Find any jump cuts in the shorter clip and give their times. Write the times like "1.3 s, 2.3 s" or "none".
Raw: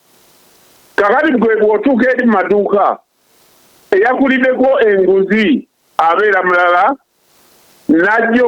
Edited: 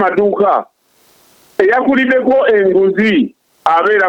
none